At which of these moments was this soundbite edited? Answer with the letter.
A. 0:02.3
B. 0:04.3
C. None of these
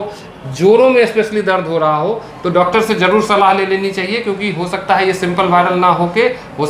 C